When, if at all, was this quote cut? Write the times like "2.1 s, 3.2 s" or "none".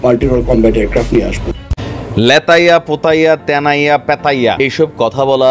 1.8 s, 4.6 s